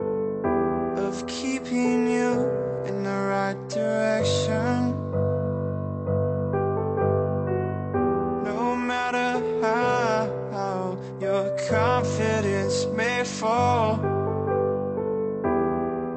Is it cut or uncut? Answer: cut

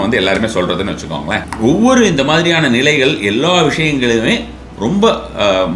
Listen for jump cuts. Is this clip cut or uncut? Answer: cut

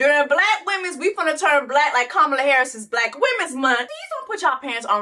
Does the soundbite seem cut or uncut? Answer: uncut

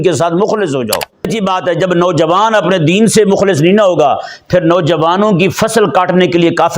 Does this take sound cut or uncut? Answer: cut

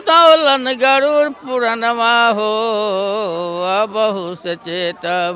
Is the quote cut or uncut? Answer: uncut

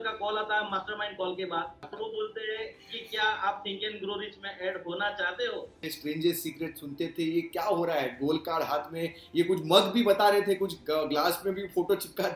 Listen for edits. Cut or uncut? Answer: cut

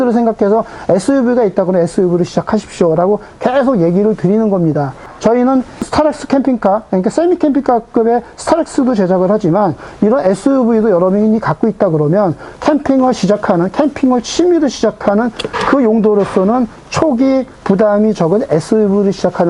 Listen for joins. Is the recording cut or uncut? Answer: uncut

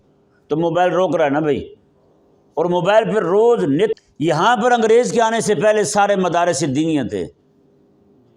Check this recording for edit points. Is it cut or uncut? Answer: cut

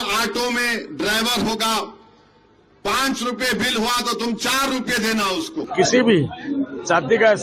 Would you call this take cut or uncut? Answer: cut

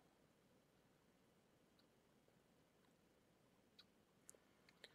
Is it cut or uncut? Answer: uncut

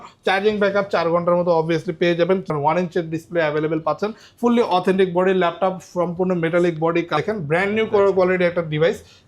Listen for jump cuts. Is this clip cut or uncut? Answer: cut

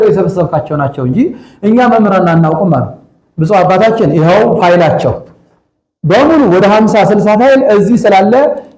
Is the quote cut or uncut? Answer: uncut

